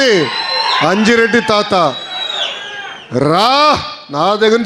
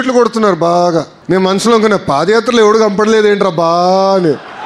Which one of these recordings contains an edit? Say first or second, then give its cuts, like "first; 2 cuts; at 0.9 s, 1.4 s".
second; 1 cut; at 1.1 s